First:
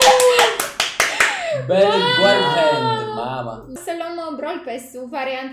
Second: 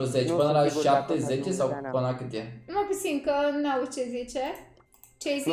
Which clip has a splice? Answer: first; 1 cut; at 3.8 s

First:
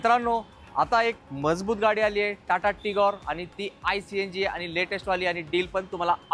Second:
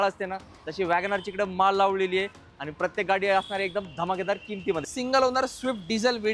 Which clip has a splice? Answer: second; 1 cut; at 4.9 s

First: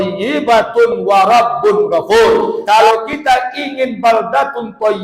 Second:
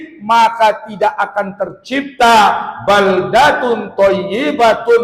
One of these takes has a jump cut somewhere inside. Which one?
first; 1 cut; at 2.6 s

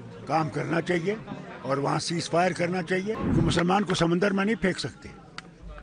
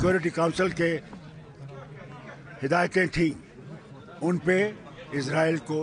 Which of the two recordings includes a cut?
first; 1 cut; at 3.2 s

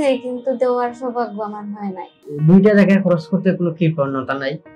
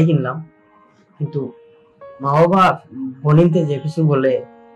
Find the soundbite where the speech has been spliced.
first; 1 cut; at 2.3 s

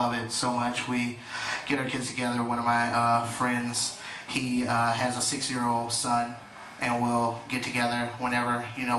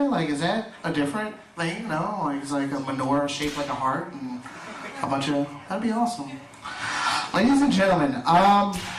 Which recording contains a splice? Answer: second; 1 cut; at 7.6 s

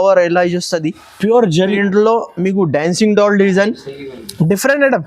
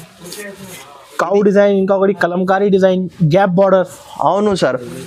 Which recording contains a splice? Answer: first; 1 cut; at 1.8 s

